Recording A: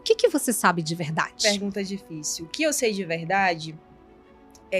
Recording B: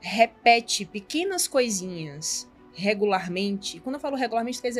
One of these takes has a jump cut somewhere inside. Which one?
A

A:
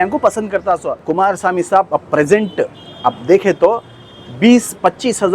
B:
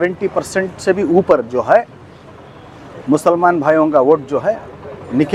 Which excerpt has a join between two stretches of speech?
A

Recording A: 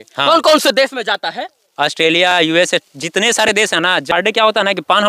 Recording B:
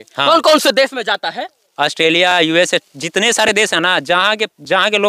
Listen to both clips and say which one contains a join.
A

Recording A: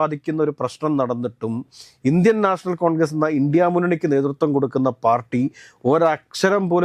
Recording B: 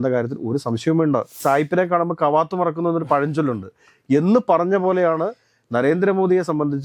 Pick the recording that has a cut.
B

